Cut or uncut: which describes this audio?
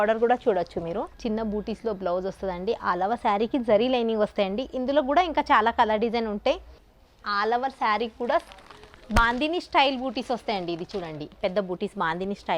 cut